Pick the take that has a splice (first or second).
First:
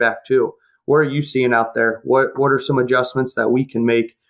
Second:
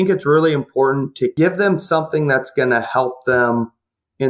second